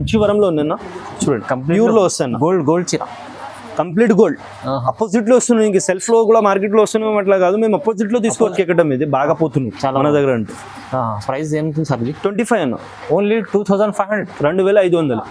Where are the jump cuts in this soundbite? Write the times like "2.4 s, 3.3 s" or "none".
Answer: 8.5 s